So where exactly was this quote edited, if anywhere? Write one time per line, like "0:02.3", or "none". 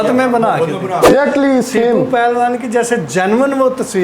0:01.1

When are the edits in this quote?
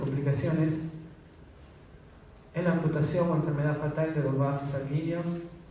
none

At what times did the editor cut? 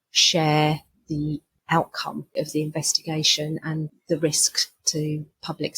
0:02.3

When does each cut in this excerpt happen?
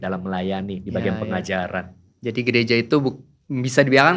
none

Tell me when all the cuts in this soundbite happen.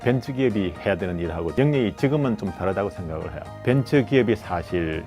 0:01.5
0:03.5

